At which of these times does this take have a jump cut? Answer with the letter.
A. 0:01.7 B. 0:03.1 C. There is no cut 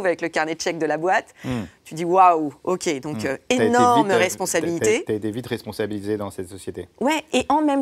C